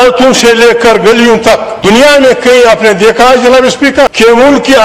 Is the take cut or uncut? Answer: cut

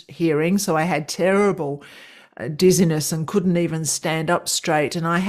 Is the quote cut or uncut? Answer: uncut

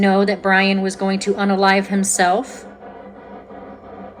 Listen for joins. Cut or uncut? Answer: uncut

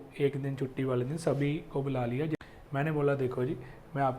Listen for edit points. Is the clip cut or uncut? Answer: cut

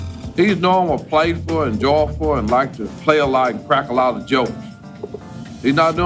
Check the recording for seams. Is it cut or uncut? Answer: uncut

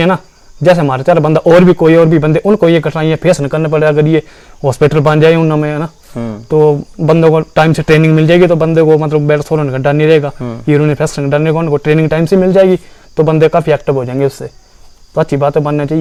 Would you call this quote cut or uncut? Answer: uncut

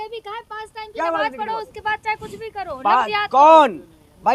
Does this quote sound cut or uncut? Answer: uncut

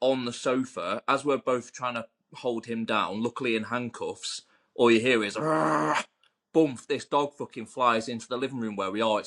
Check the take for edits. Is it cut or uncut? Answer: uncut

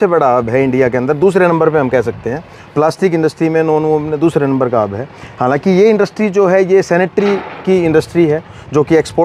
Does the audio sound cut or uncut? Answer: uncut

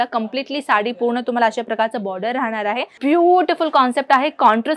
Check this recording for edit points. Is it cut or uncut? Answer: cut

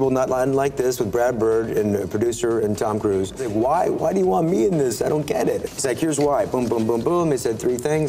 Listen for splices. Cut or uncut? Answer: cut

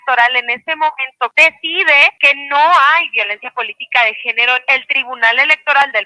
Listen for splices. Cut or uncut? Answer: cut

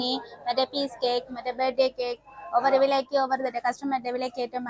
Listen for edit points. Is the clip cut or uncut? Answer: uncut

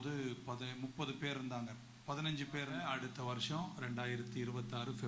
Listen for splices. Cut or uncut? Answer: cut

